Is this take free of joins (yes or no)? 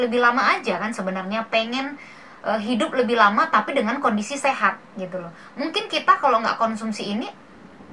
yes